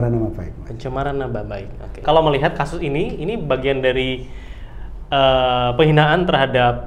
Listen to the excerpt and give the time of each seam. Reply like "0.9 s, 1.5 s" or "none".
2.0 s

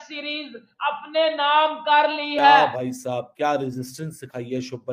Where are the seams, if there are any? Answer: 2.7 s

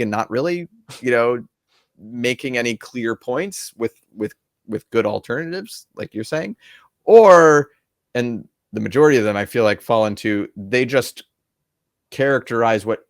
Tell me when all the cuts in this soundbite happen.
none

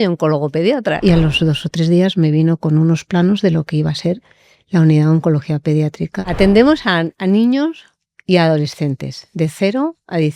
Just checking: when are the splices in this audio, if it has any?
1.0 s, 6.2 s

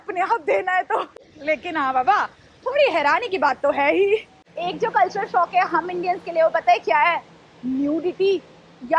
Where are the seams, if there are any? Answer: none

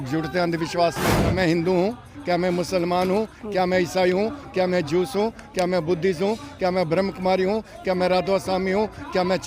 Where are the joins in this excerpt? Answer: 1.3 s

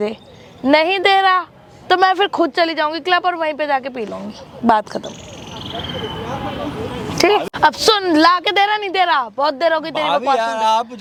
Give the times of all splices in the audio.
none

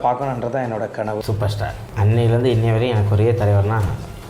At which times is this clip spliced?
1.2 s

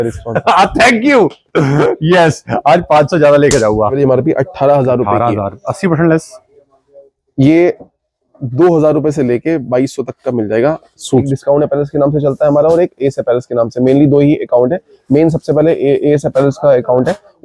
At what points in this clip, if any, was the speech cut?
4.0 s, 11.3 s

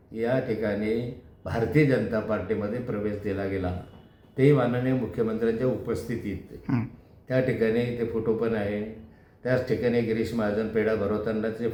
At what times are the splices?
none

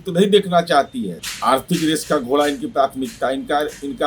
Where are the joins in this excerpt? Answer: 1.2 s

